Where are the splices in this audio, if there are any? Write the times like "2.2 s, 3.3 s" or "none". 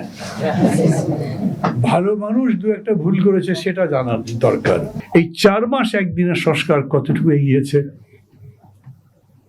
5.0 s